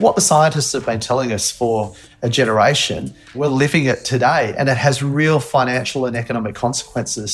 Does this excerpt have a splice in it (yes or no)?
yes